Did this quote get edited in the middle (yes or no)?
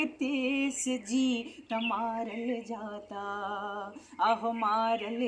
no